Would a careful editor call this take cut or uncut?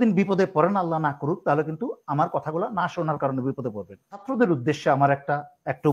cut